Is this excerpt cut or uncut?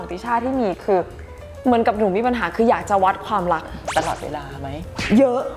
uncut